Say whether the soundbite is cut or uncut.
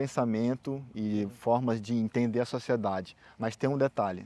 uncut